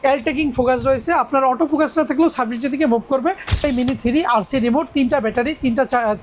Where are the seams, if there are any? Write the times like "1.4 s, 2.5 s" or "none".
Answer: 3.6 s